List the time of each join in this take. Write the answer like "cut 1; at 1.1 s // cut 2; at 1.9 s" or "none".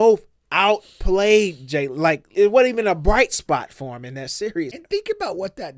cut 1; at 2.2 s // cut 2; at 4.7 s